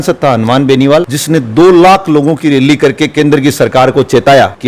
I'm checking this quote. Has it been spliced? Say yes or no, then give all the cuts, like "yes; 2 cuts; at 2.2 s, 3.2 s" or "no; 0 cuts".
no; 0 cuts